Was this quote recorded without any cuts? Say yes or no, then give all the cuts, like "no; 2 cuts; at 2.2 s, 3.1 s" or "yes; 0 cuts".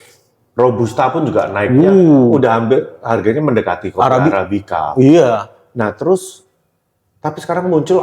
yes; 0 cuts